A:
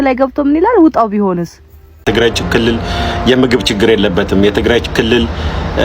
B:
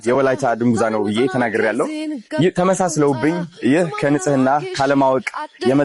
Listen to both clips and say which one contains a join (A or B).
A